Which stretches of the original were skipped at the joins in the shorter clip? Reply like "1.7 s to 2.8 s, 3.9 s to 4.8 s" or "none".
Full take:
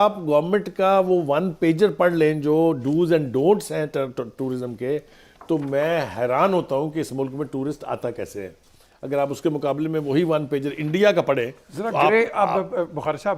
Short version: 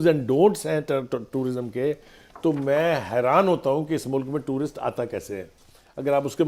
none